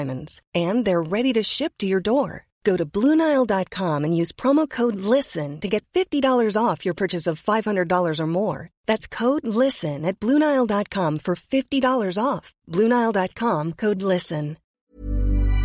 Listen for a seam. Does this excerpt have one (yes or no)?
yes